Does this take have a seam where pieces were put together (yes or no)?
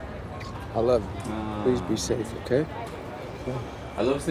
no